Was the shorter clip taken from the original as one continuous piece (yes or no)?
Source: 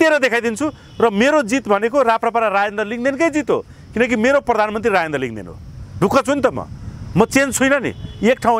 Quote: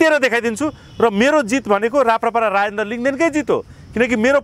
yes